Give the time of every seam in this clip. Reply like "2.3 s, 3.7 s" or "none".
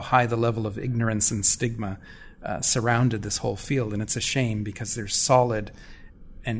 none